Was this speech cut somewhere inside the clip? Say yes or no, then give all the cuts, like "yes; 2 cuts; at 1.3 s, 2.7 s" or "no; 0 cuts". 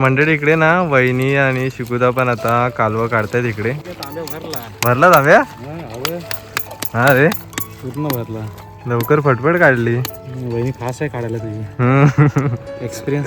no; 0 cuts